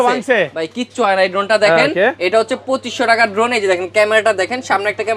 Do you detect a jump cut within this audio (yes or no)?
no